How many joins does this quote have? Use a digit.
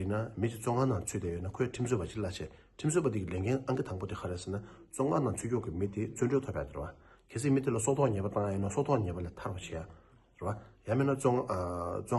0